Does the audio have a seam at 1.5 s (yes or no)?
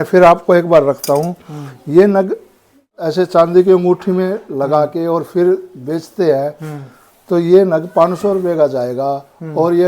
no